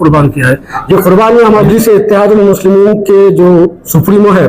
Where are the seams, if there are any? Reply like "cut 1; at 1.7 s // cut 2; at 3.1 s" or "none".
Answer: cut 1; at 1.7 s